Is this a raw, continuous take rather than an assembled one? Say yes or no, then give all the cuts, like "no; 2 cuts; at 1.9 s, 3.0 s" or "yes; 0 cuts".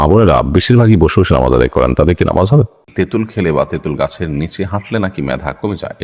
no; 1 cut; at 2.8 s